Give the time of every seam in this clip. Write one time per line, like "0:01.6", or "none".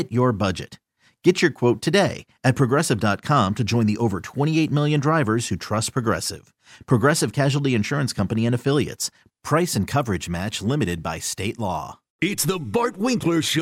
0:12.0